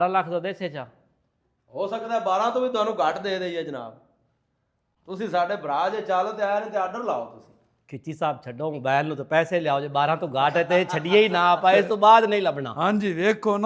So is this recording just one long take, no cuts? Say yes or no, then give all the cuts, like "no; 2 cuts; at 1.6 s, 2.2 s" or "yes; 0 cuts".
yes; 0 cuts